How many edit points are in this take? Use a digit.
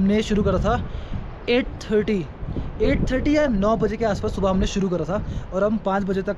0